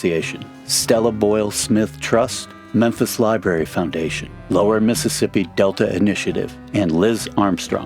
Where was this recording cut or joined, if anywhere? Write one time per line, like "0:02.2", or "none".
0:06.6

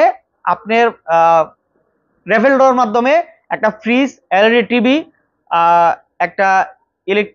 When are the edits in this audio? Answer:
none

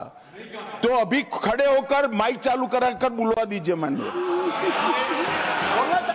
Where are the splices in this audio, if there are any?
none

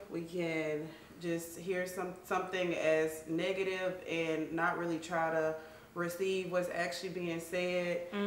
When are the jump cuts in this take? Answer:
none

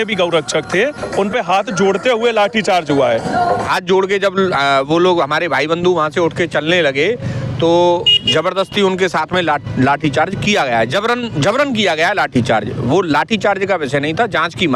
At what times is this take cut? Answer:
0:03.7

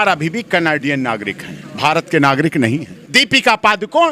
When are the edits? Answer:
0:03.0

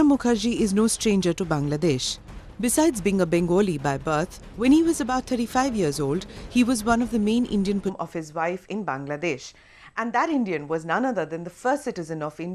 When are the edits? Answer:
none

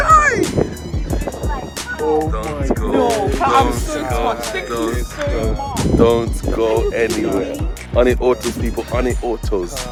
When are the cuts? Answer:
none

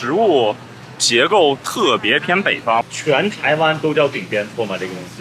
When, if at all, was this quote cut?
0:02.8

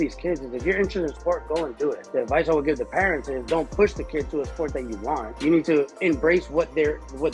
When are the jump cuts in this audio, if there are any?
0:02.0
0:05.3
0:05.9

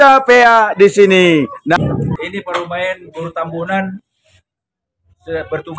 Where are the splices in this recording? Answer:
0:01.8

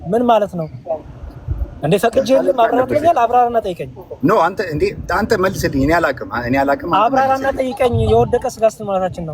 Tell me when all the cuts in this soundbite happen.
none

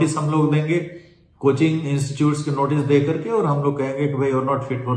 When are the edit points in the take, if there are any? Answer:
none

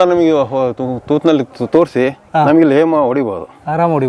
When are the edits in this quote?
none

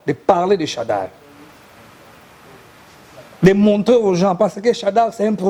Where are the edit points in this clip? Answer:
none

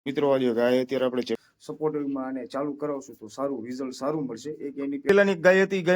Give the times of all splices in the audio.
0:01.4
0:05.1

